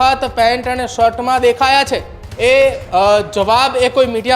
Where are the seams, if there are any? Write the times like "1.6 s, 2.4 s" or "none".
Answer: 2.2 s